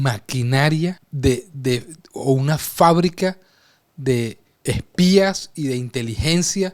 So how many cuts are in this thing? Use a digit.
2